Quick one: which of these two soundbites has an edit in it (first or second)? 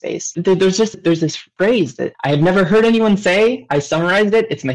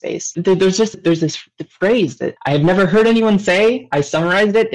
first